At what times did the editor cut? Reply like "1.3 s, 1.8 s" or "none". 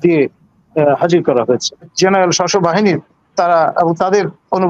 1.9 s